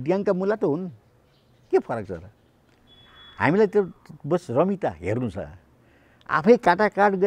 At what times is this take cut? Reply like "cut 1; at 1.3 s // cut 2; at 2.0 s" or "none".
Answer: none